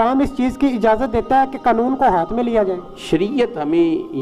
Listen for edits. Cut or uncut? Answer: cut